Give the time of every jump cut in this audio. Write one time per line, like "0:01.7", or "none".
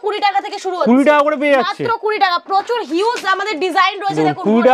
none